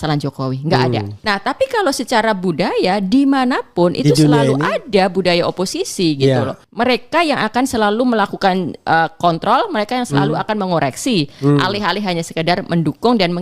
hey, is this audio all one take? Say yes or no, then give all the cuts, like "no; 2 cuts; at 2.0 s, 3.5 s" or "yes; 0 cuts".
no; 2 cuts; at 1.2 s, 6.6 s